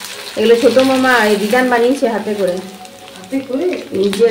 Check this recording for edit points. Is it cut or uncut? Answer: uncut